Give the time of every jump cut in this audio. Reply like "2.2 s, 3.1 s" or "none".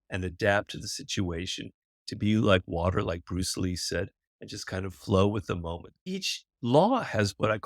6.1 s

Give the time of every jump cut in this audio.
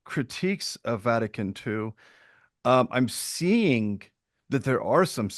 none

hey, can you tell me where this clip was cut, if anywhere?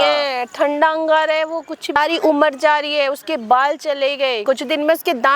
2.0 s, 4.4 s

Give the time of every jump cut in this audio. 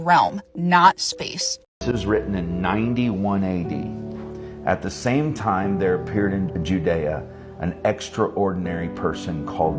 1.6 s

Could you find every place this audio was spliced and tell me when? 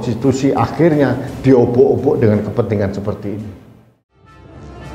4.0 s

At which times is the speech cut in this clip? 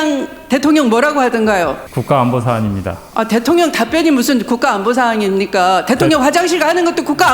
1.9 s

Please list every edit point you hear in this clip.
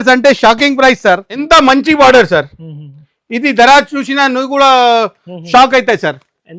1.3 s

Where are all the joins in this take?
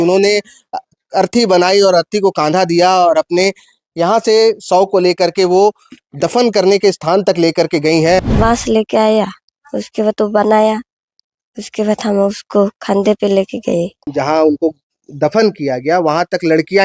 8.2 s, 14.0 s

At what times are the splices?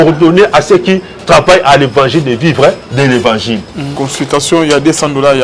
4.0 s

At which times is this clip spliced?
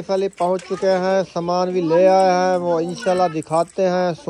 none

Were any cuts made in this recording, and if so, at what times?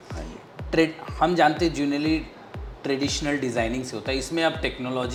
none

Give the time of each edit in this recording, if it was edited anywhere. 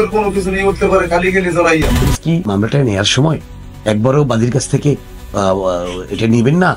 2.4 s

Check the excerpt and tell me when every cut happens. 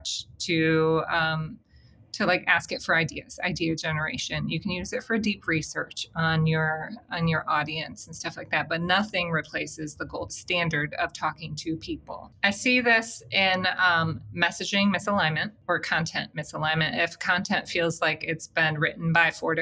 12.3 s, 15.5 s

